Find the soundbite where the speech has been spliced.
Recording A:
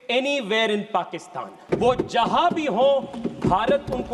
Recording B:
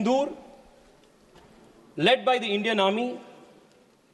A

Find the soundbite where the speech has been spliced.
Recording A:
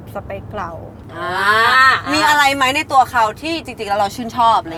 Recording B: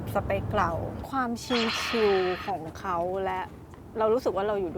B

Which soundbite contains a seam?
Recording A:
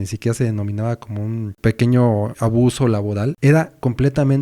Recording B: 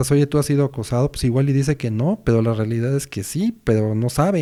A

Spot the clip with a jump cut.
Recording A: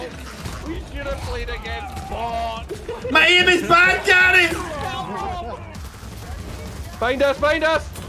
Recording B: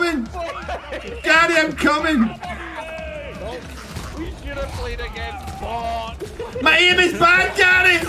A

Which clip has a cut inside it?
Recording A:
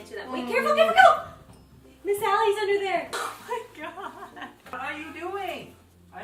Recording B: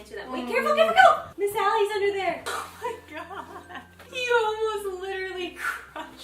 B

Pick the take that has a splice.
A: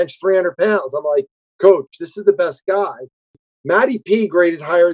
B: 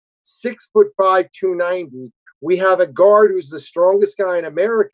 A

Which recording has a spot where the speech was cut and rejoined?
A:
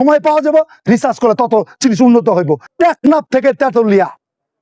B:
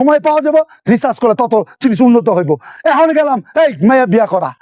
A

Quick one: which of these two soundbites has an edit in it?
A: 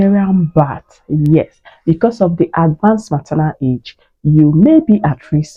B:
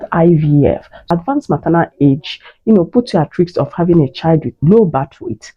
B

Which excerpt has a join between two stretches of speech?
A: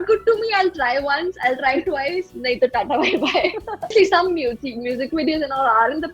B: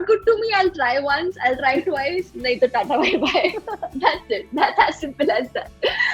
A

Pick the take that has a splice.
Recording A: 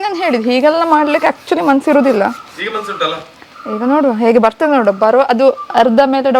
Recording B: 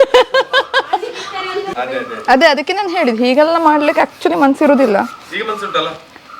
B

